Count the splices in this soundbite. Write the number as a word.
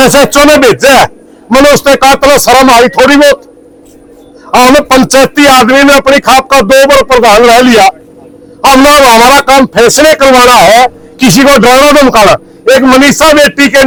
zero